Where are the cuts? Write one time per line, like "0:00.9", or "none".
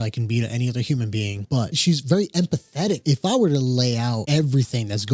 0:01.6
0:03.0
0:04.2